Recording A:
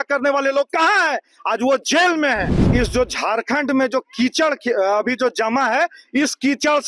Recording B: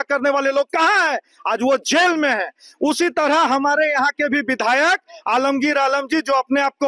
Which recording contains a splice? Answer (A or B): A